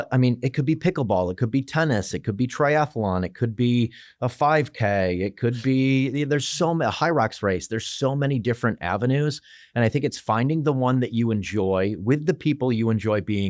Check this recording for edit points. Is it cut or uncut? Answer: uncut